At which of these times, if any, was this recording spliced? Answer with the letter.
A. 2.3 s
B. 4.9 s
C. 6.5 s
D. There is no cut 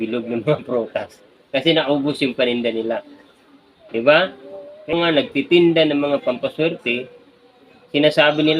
B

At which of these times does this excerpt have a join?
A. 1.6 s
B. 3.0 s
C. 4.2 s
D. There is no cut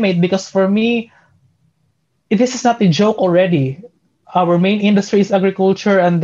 C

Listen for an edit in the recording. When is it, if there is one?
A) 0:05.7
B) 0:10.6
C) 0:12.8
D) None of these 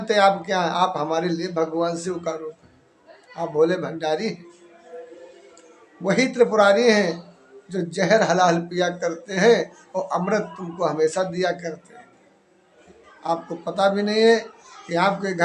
C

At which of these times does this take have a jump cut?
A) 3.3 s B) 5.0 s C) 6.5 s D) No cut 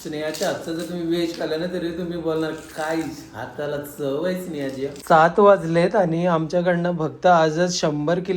B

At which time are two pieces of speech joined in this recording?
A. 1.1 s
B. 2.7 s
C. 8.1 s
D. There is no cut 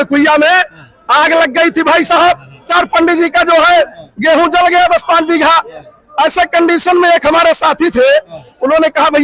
B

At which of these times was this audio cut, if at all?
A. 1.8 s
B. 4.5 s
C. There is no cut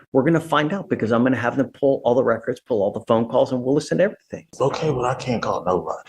B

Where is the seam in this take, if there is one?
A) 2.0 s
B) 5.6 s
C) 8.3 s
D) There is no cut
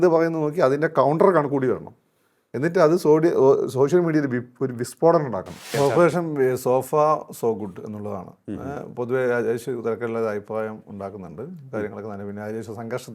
B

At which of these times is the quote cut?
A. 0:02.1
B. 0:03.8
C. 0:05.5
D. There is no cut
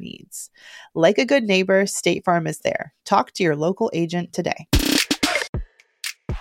C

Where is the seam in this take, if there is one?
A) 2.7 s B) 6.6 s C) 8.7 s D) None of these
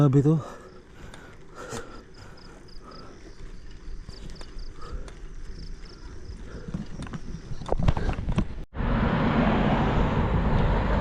D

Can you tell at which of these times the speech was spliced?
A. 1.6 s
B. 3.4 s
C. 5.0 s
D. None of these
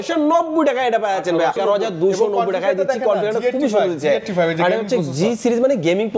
A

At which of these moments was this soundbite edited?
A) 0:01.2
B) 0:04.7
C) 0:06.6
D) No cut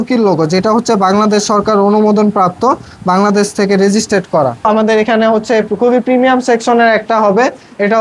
B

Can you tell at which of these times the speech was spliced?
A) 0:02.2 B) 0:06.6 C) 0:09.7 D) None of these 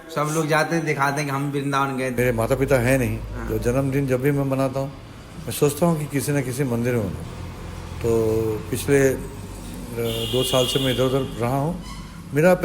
A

